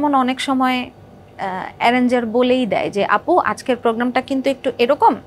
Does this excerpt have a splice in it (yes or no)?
no